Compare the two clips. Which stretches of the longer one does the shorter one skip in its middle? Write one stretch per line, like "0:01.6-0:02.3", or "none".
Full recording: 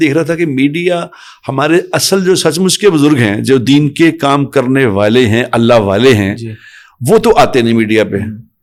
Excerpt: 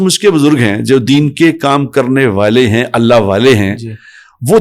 none